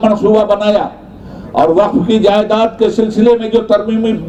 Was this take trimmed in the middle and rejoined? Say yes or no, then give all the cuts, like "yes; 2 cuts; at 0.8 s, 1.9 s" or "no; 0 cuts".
no; 0 cuts